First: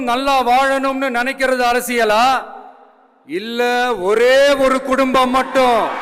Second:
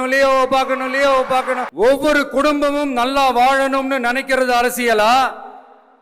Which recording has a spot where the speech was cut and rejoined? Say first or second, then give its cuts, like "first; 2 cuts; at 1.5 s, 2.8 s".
second; 1 cut; at 1.7 s